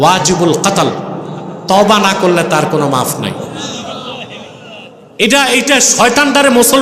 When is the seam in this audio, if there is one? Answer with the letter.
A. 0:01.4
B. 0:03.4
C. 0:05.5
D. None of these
B